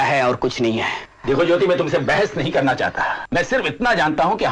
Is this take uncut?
yes; 0 cuts

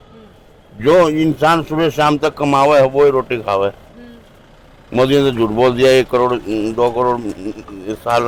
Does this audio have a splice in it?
no; 0 cuts

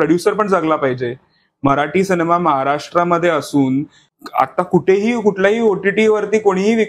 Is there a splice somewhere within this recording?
yes; 1 cut; at 4.0 s

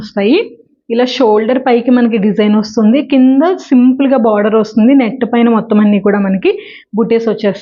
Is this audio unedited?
yes; 0 cuts

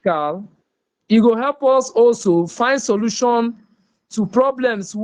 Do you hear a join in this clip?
no; 0 cuts

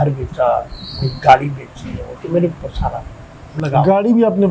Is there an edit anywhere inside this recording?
no; 0 cuts

